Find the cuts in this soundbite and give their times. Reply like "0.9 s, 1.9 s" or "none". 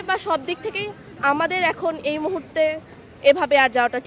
none